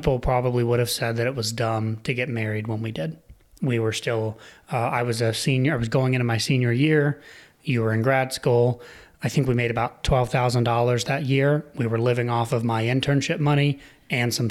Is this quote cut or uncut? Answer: uncut